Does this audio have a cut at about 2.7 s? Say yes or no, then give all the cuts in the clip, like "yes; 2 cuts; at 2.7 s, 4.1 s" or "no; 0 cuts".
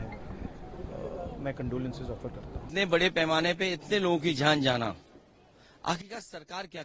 yes; 1 cut; at 2.7 s